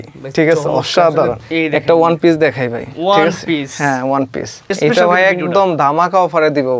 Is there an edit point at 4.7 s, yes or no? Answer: yes